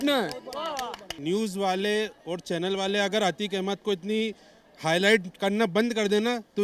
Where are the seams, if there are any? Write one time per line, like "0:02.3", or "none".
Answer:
0:01.1